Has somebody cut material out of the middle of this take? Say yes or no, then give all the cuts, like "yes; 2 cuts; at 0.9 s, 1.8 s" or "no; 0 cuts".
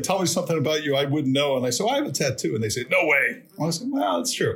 no; 0 cuts